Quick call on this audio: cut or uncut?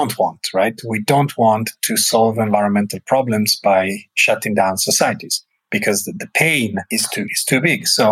cut